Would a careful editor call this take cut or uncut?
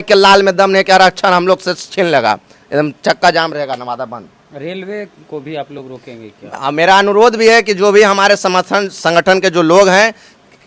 uncut